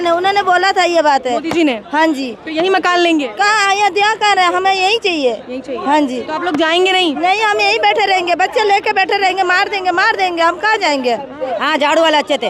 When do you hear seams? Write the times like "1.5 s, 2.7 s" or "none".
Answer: 11.5 s